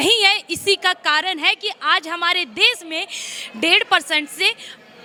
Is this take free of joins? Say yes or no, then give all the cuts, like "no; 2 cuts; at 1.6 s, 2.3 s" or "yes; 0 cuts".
yes; 0 cuts